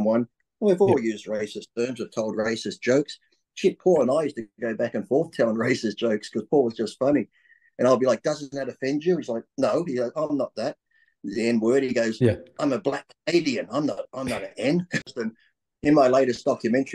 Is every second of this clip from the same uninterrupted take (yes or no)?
no